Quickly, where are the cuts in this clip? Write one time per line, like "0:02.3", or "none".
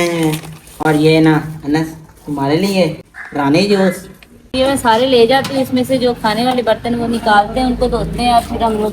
0:03.1
0:04.5